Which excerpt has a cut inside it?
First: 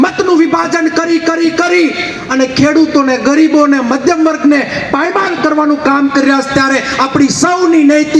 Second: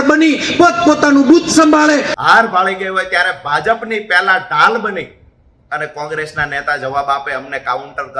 second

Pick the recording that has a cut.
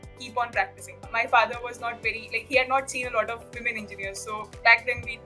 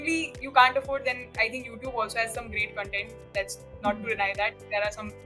first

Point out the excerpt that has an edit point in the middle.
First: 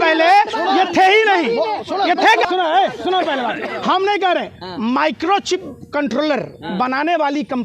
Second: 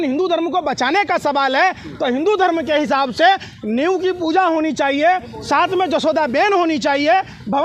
first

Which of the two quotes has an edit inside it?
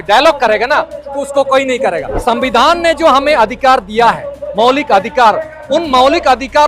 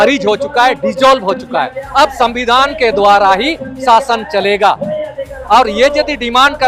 first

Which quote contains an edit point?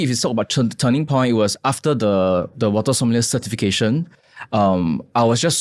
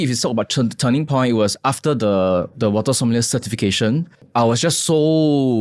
second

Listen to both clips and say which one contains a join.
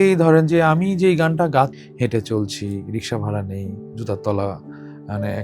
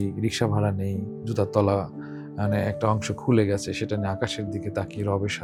first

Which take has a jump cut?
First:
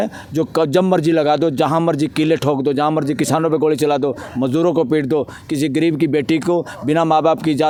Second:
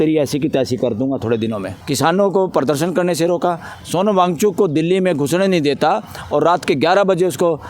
second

